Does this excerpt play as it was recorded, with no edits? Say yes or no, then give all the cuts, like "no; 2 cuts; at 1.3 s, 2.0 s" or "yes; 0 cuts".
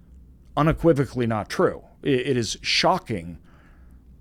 yes; 0 cuts